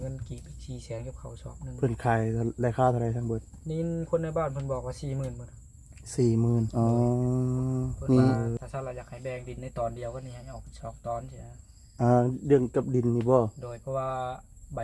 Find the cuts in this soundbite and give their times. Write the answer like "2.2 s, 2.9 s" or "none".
6.7 s